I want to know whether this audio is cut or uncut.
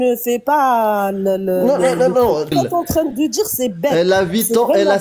cut